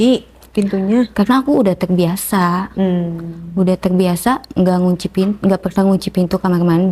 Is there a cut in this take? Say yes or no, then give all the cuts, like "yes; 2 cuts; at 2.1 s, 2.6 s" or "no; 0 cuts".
no; 0 cuts